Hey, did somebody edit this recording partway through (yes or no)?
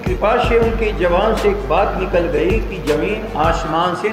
no